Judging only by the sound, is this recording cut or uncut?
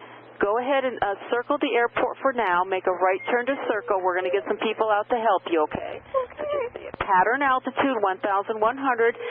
cut